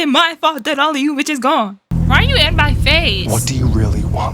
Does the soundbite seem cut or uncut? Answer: cut